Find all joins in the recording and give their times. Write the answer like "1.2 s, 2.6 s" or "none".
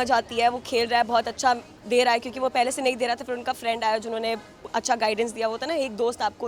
none